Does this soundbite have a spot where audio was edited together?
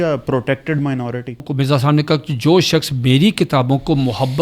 yes; 1 cut; at 1.5 s

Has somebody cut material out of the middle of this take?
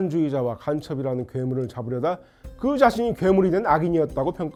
no; 0 cuts

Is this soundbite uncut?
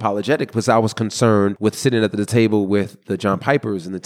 no; 1 cut; at 1.6 s

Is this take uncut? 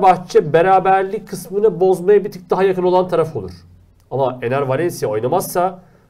yes; 0 cuts

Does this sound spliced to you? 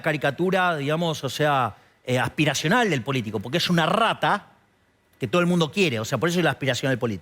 no; 0 cuts

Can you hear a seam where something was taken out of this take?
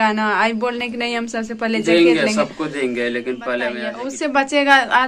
yes; 1 cut; at 3.9 s

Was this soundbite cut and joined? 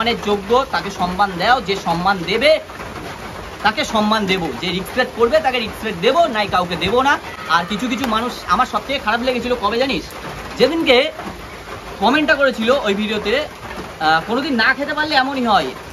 no; 0 cuts

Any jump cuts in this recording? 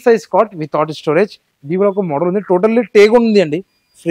no; 0 cuts

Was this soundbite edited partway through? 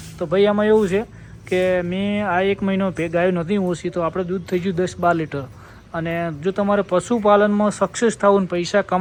no; 0 cuts

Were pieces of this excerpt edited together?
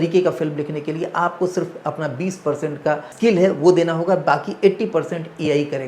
yes; 1 cut; at 3.1 s

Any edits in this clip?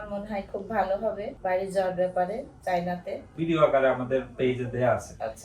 yes; 2 cuts; at 1.3 s, 3.2 s

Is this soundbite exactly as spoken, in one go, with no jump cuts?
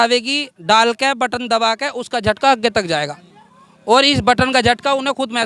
yes; 0 cuts

